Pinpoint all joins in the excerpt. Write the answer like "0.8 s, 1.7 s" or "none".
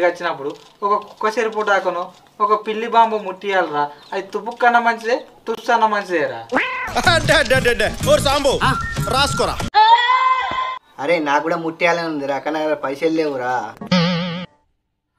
none